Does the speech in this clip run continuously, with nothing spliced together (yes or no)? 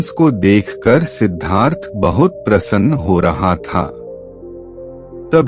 yes